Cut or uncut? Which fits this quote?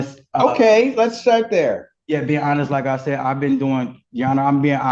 uncut